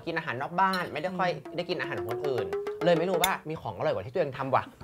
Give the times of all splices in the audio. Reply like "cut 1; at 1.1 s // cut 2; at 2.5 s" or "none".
cut 1; at 3.4 s